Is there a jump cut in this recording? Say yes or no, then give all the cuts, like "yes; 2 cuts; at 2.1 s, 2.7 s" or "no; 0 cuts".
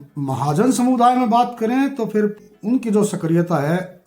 yes; 1 cut; at 2.5 s